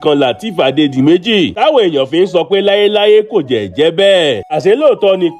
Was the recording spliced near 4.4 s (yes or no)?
yes